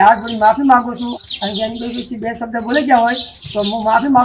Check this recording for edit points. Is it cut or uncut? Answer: cut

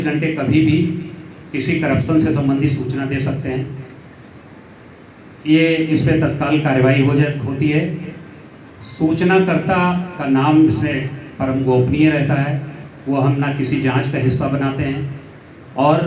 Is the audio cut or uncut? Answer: uncut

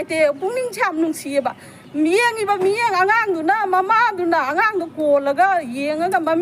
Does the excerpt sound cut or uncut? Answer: uncut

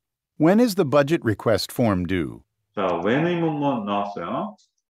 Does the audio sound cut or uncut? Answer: uncut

